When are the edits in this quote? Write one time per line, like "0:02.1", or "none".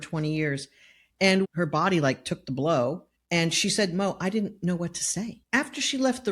0:01.0
0:03.1
0:05.4

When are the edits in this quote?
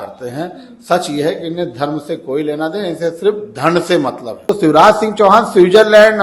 0:04.3

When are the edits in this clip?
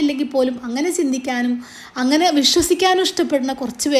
none

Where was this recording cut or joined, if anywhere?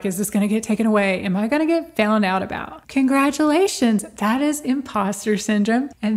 none

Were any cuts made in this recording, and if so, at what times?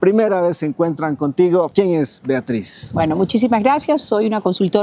0:01.7

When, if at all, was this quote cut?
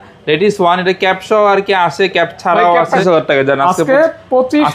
0:03.0

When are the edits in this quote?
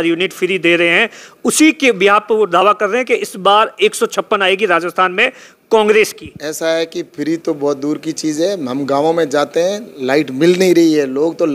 none

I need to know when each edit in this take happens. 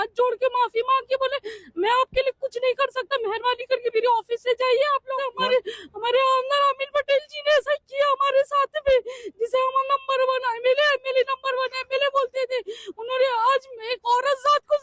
0:05.3

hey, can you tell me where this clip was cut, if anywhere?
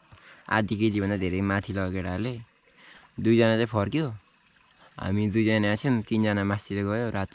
none

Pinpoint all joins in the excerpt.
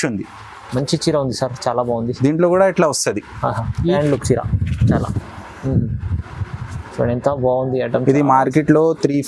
0:04.0

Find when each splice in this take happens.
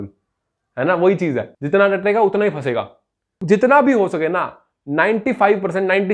none

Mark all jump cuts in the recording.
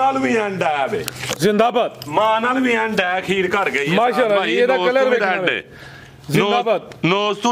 none

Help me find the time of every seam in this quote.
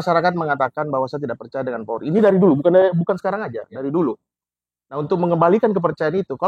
none

